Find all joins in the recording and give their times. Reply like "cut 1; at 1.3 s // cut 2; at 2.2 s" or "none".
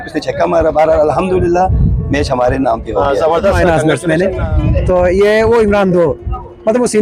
cut 1; at 3.6 s